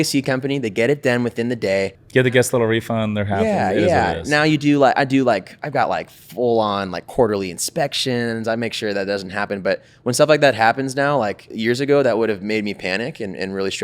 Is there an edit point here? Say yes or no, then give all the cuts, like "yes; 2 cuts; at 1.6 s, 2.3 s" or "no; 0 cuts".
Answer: yes; 2 cuts; at 2.0 s, 11.5 s